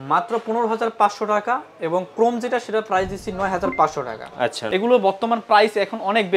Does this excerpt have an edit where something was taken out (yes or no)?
yes